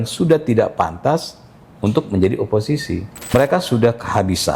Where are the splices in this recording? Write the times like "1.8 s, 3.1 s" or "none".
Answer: 3.1 s